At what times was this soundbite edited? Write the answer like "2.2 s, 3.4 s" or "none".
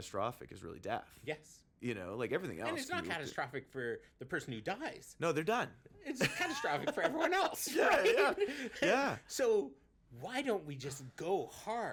none